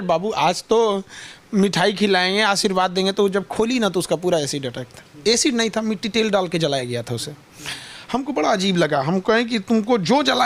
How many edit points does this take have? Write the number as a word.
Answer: zero